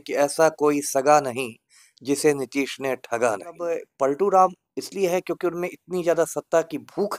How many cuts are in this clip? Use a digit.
1